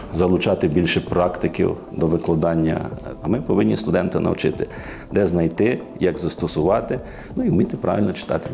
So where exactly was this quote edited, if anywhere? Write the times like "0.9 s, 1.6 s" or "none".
3.0 s

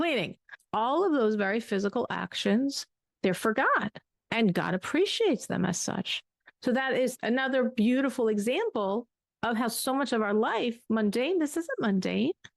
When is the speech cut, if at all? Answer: 7.2 s

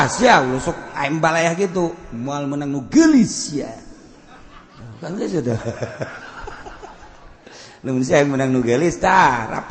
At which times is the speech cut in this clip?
3.9 s

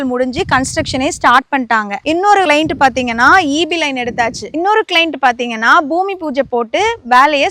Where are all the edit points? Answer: none

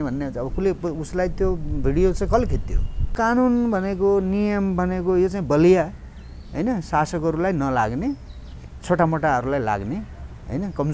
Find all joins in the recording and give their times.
3.1 s

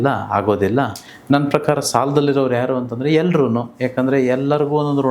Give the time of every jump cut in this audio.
1.1 s

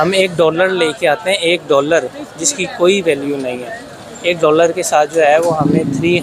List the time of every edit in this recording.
none

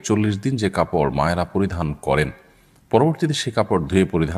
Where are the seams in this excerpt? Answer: none

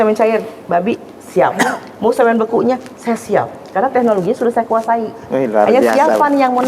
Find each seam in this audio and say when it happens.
none

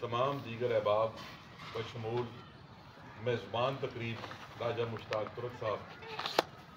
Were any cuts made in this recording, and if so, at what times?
none

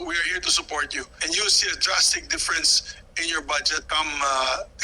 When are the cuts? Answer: 1.1 s, 3.8 s

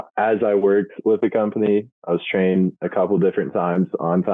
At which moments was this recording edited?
none

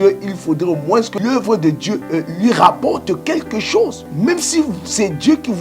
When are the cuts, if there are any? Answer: 2.0 s, 4.0 s

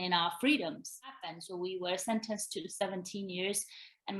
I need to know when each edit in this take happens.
1.5 s

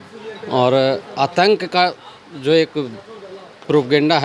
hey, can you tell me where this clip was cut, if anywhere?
none

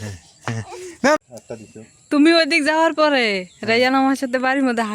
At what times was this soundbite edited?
1.2 s

